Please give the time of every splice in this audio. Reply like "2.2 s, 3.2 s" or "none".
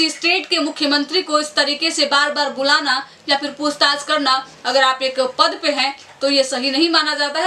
none